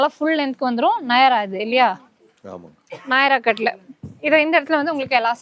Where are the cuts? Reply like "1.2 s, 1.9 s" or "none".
none